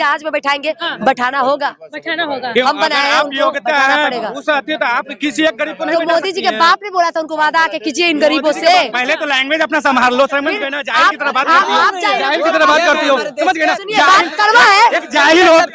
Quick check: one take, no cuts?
yes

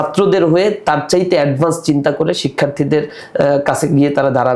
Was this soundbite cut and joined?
no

